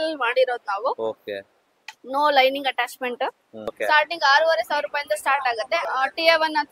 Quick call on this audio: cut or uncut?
cut